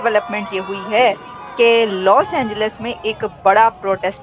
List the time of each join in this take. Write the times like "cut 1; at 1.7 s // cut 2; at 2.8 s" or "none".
none